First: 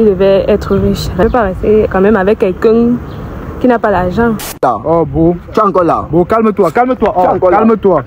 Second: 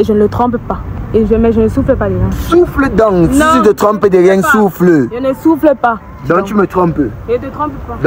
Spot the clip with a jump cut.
first; 2 cuts; at 1.2 s, 4.6 s

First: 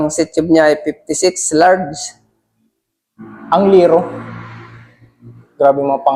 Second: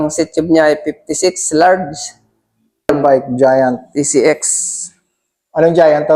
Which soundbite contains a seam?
second; 1 cut; at 2.9 s

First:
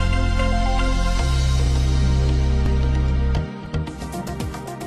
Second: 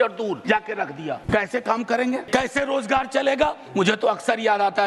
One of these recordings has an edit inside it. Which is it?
second; 3 cuts; at 0.7 s, 2.2 s, 3.6 s

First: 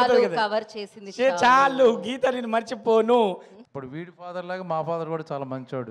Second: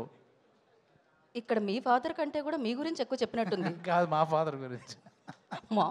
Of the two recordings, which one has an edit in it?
first; 1 cut; at 3.5 s

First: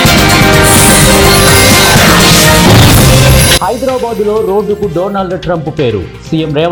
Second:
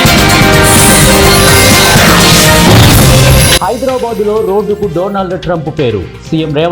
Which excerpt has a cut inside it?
second; 2 cuts; at 2.2 s, 3.6 s

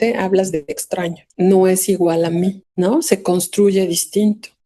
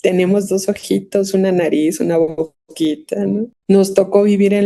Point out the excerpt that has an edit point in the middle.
first; 2 cuts; at 1.2 s, 2.6 s

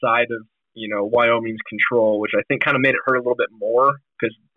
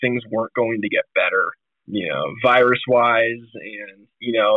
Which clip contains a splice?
second; 1 cut; at 1.8 s

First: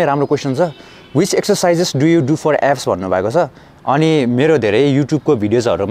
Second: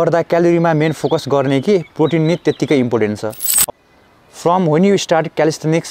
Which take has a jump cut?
second; 1 cut; at 3.7 s

